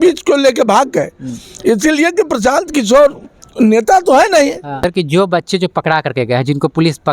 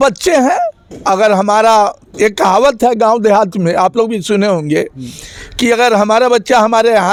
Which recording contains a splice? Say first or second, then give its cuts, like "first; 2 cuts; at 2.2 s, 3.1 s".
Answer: first; 1 cut; at 4.8 s